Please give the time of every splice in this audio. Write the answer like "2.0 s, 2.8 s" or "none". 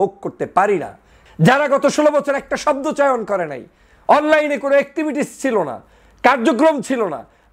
1.1 s